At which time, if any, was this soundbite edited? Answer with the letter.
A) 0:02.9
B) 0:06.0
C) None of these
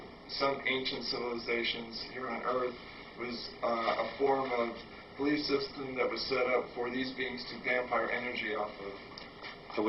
C